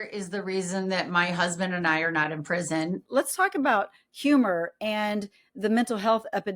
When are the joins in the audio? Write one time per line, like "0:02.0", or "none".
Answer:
0:03.0

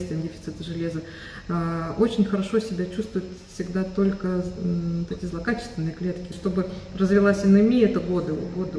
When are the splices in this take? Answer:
0:06.3

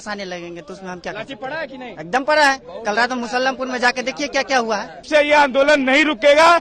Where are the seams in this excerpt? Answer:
0:05.0

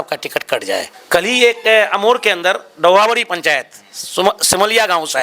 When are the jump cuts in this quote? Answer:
0:00.9

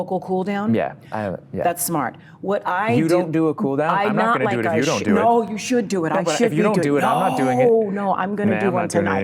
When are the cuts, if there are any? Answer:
none

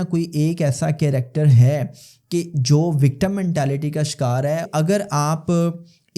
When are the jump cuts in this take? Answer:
0:04.7

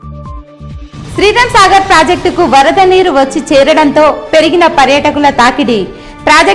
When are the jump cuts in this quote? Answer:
none

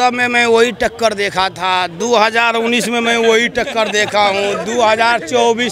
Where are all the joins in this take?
none

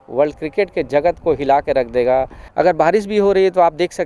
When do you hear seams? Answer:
0:02.4

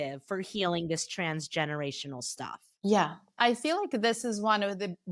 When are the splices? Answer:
0:03.4

